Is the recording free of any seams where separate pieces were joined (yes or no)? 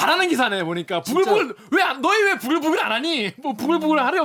yes